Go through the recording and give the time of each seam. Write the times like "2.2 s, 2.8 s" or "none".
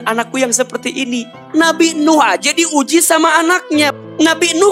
1.3 s, 3.9 s

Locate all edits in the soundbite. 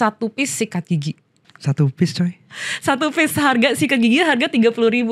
1.5 s

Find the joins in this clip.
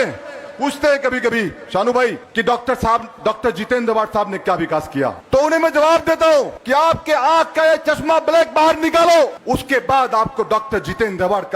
2.2 s, 5.2 s, 6.6 s, 9.4 s

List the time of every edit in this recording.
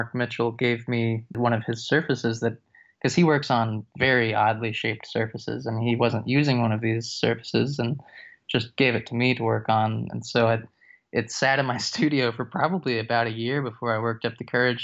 none

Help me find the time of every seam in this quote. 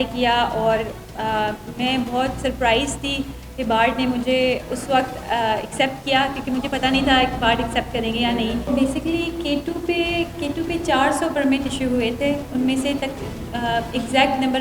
8.7 s

